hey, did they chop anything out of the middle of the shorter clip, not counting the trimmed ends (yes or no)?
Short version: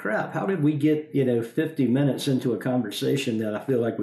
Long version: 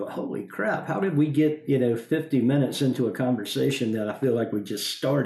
no